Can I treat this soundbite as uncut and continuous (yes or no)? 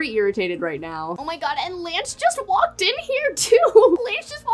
yes